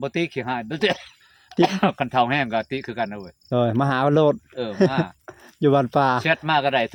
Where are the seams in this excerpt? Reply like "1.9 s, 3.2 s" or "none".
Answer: none